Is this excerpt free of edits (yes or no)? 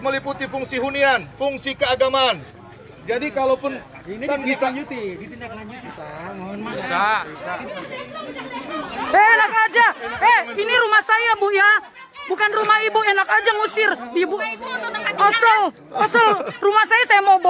no